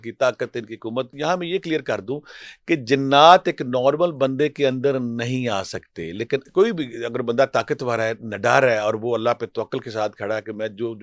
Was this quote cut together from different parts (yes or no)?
yes